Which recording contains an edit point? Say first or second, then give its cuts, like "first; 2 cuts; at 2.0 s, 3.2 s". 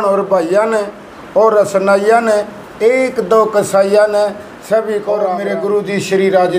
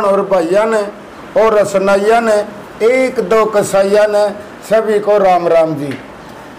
first; 1 cut; at 5.4 s